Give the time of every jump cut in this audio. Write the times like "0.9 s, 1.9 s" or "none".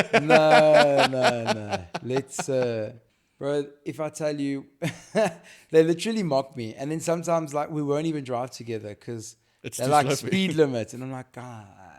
3.0 s